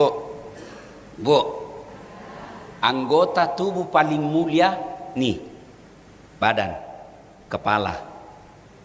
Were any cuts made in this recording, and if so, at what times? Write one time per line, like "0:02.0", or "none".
none